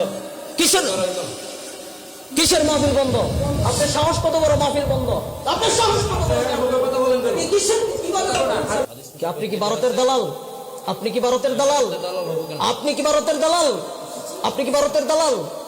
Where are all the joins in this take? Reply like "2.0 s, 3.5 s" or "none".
8.8 s